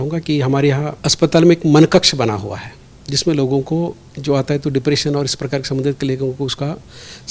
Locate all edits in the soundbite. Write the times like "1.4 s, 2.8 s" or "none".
1.0 s

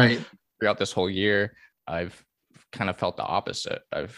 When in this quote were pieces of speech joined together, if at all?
1.7 s

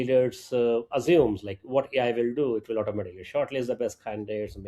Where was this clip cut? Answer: none

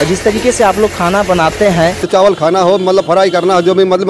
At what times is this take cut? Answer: 2.1 s

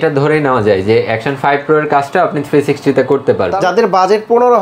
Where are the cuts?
3.6 s

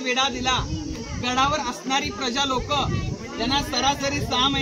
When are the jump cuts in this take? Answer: none

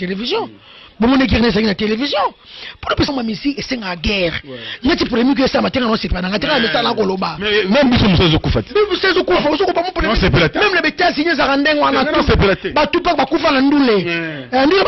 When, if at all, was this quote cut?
3.1 s

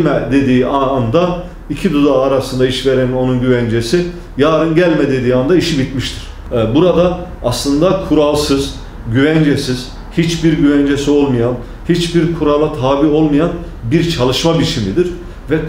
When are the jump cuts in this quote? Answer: 6.4 s

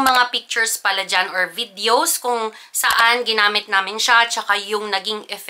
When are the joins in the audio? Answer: none

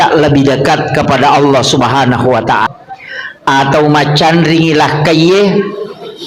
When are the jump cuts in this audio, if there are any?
2.7 s

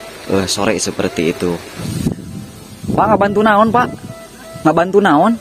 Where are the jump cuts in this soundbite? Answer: 1.8 s

